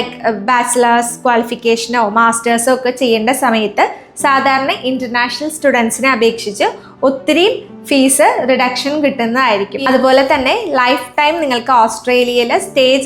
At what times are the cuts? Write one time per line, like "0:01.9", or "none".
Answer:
0:09.8